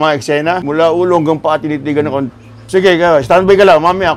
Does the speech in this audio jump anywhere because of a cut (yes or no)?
yes